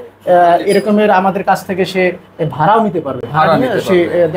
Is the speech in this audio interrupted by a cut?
no; 0 cuts

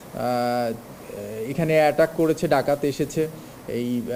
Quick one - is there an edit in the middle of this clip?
no; 0 cuts

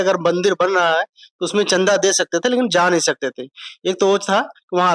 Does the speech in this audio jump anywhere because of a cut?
no; 0 cuts

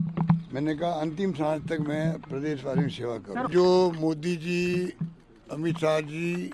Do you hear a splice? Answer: yes; 1 cut; at 3.5 s

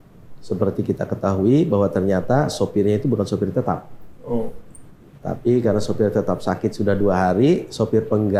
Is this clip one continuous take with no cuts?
yes; 0 cuts

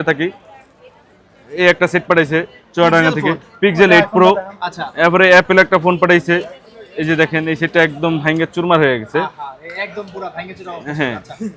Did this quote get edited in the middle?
no; 0 cuts

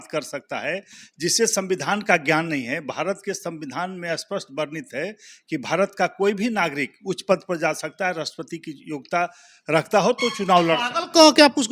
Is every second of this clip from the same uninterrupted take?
yes; 0 cuts

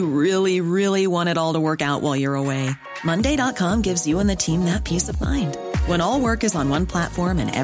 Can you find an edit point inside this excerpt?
no; 0 cuts

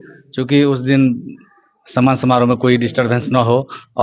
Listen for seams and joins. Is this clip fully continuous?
yes; 0 cuts

